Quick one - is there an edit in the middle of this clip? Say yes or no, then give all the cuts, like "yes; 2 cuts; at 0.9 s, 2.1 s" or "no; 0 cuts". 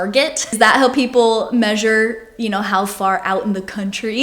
no; 0 cuts